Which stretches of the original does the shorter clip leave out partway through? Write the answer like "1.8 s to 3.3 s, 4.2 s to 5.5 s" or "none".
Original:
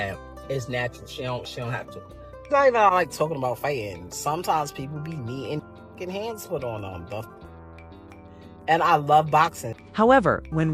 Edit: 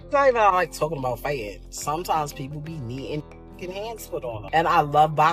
6.8 s to 8.6 s

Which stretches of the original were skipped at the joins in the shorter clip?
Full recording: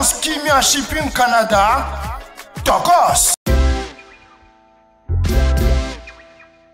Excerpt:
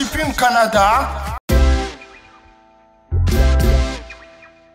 2.1 s to 3.3 s

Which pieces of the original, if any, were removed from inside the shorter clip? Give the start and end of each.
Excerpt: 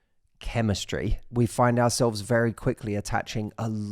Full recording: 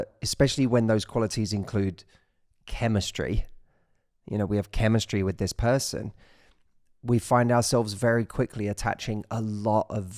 3.5 s to 6.9 s

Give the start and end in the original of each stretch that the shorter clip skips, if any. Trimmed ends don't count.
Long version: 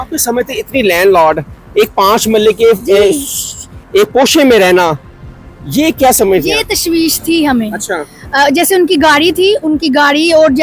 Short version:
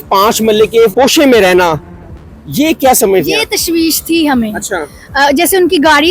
2.8 s to 4.1 s

